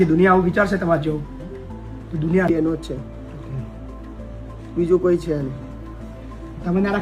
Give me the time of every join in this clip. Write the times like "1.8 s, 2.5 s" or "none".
2.5 s